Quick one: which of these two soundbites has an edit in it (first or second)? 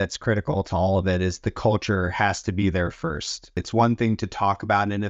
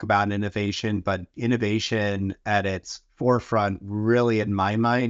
first